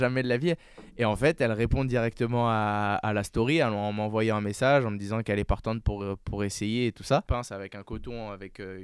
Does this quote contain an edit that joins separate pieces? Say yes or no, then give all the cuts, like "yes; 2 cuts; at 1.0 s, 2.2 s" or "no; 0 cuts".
yes; 1 cut; at 7.3 s